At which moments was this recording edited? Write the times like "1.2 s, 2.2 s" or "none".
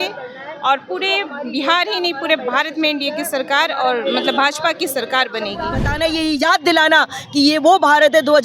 5.9 s